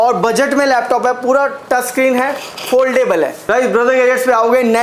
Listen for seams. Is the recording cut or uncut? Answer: cut